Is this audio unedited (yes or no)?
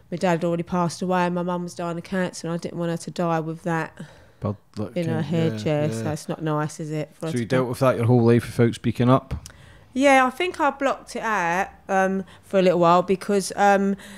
yes